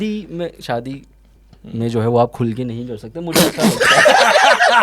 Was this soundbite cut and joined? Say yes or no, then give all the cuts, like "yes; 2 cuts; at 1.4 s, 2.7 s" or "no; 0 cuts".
no; 0 cuts